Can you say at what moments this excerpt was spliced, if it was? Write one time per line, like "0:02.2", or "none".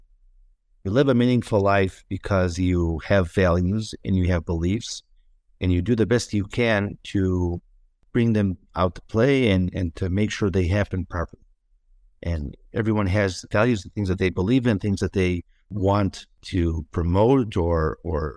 0:13.4
0:15.7